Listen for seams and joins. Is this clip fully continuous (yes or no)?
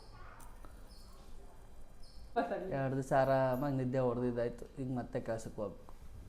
no